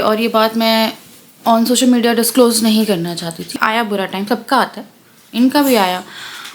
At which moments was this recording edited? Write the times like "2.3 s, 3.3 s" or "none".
3.5 s